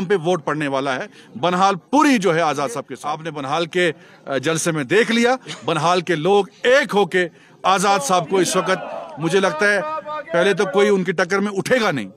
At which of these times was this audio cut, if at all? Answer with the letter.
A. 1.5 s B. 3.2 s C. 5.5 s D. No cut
B